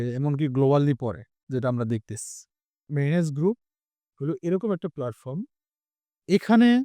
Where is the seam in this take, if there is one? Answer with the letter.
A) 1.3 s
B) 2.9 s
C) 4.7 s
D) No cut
B